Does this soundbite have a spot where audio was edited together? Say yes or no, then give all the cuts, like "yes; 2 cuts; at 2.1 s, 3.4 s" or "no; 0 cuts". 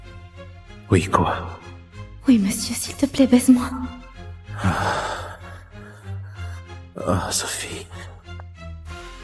yes; 1 cut; at 7.9 s